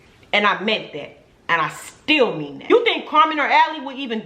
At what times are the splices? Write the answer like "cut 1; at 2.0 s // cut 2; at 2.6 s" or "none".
cut 1; at 2.7 s